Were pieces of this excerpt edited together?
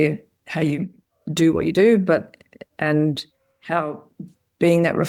no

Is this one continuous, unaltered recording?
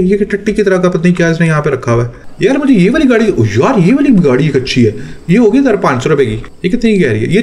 no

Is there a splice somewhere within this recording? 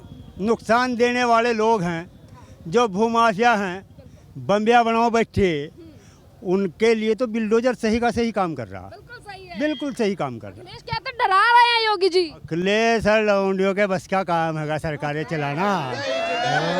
no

